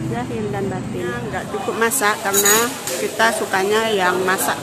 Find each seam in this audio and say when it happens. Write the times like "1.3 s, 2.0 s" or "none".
1.4 s